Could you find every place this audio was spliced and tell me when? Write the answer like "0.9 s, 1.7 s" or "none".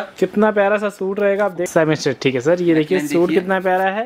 1.6 s